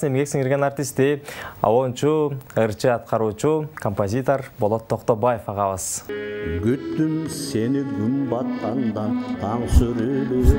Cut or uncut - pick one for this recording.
cut